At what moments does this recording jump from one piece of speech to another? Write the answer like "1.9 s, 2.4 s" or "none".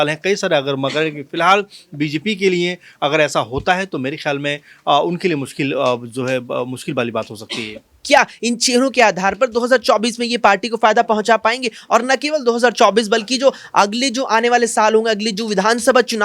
7.9 s